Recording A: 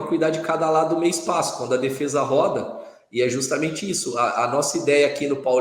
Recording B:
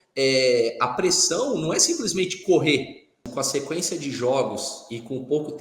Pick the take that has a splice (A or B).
B